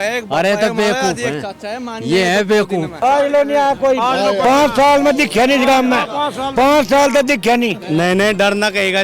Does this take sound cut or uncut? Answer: cut